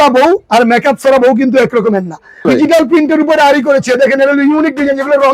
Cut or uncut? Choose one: cut